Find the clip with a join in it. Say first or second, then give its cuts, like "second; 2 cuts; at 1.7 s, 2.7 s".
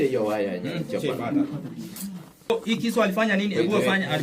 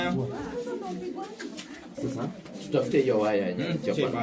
first; 1 cut; at 2.5 s